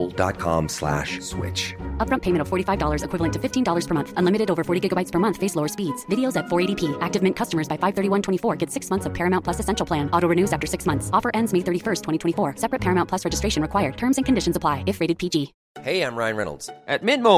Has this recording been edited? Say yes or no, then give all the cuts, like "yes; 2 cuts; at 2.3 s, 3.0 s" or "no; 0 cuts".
yes; 1 cut; at 15.7 s